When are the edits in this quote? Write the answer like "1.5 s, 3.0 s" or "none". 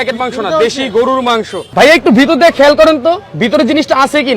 1.5 s